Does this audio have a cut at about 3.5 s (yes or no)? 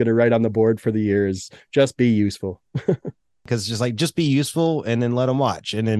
yes